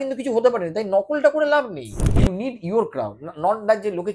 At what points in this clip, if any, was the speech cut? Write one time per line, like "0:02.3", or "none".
0:02.0